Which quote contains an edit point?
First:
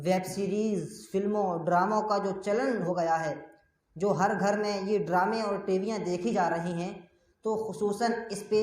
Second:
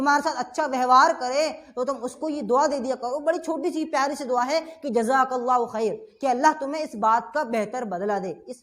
first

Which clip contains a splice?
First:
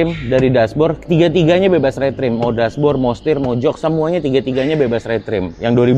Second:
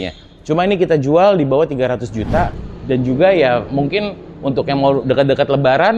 second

